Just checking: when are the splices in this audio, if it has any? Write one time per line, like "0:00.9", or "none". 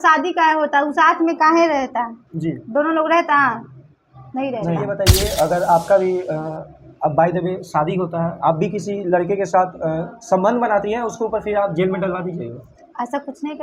0:04.9